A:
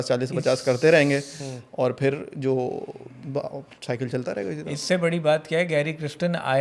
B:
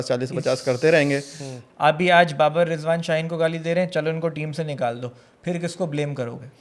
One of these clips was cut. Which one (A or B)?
B